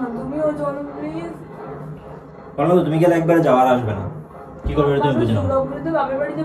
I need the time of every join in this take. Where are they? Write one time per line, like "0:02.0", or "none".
none